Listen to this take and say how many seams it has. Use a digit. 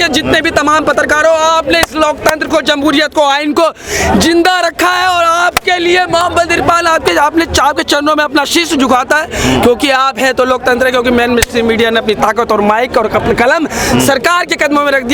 0